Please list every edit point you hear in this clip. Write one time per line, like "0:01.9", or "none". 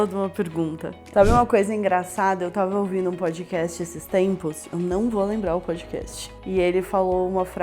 0:00.9